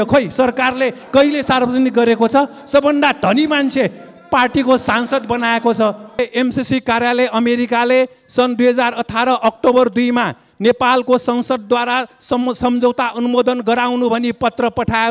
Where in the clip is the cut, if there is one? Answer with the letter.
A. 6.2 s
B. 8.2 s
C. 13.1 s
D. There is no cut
A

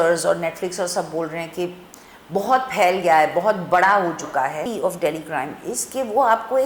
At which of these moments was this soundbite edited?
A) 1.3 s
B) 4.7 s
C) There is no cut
B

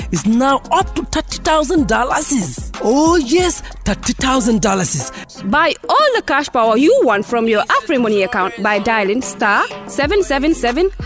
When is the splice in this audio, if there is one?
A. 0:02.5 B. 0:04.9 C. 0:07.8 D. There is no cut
D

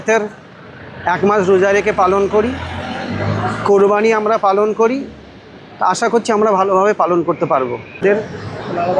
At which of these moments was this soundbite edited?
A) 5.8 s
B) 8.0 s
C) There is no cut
B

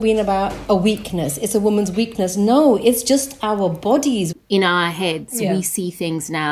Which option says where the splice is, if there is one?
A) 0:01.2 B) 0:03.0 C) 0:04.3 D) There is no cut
C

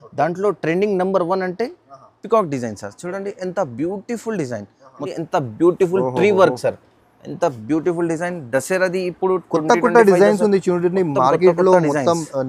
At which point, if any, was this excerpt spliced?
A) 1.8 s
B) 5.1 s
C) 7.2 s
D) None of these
B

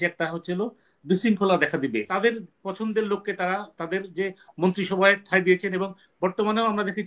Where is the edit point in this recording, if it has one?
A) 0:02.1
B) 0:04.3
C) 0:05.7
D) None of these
A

